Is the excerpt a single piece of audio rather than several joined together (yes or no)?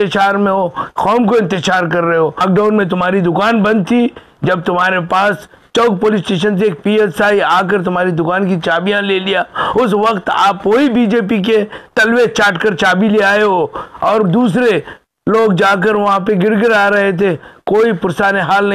no